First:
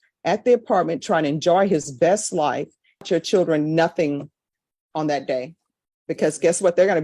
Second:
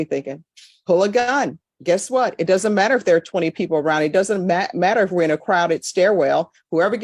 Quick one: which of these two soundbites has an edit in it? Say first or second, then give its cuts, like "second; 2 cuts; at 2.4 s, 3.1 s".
first; 1 cut; at 3.0 s